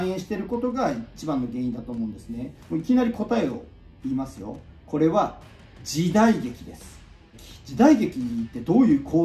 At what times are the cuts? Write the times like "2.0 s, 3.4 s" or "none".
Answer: 2.6 s, 4.6 s, 7.4 s

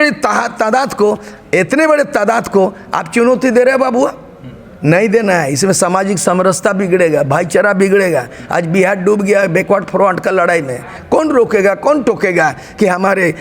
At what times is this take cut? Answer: 10.9 s

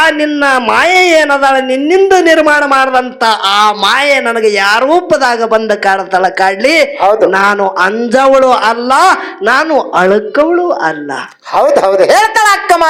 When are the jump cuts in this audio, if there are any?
none

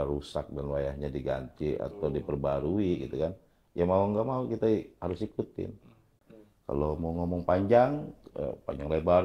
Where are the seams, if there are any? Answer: 6.1 s

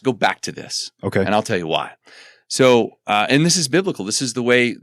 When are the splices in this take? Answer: none

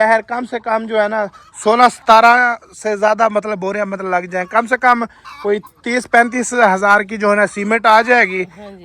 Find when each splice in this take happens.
none

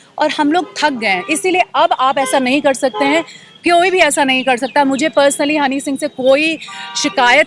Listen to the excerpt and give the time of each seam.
none

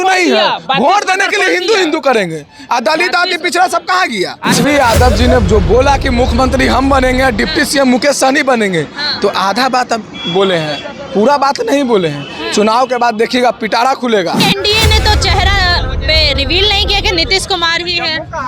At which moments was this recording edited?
4.5 s, 14.4 s

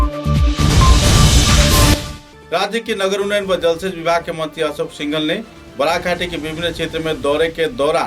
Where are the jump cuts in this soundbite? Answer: none

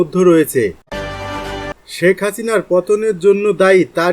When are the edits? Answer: 1.3 s

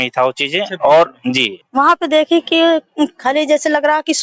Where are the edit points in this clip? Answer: 1.5 s

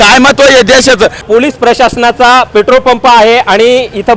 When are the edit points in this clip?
1.2 s

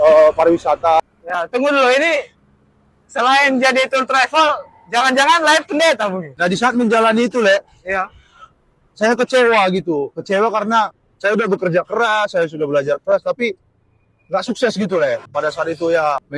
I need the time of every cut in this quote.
1.0 s, 6.3 s, 15.3 s

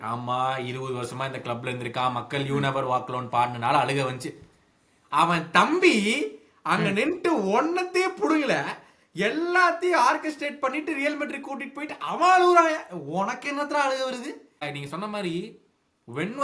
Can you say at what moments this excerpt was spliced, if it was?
14.7 s

